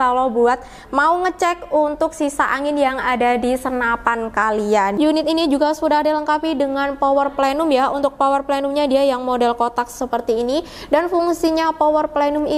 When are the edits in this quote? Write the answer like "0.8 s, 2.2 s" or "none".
5.0 s